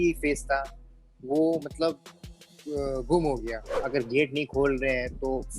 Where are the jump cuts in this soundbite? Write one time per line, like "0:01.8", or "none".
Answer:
0:03.8